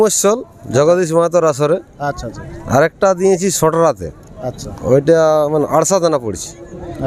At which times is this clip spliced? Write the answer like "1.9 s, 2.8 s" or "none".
none